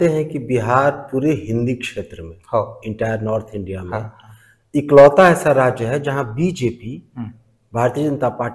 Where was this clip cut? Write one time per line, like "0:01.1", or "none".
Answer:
none